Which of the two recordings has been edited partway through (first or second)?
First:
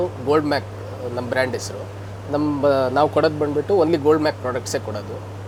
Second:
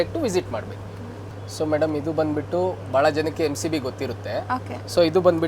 second